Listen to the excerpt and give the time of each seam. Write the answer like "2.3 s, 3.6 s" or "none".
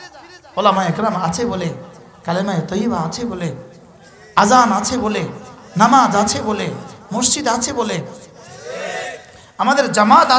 none